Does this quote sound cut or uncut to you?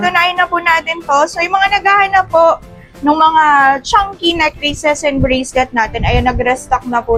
uncut